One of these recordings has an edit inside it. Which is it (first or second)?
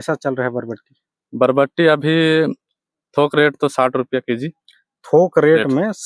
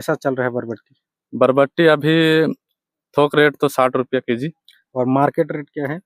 second